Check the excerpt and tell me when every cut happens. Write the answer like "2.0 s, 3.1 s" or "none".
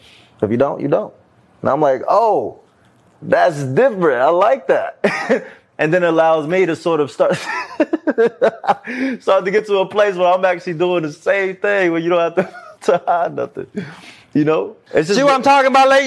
14.8 s